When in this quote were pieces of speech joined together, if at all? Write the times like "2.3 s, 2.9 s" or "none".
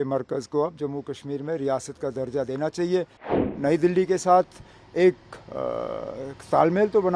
3.4 s